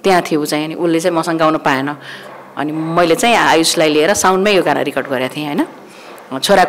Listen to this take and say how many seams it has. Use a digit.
0